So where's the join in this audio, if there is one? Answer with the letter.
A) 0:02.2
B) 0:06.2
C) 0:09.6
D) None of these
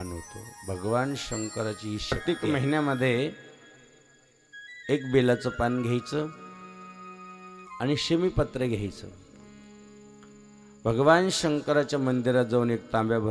A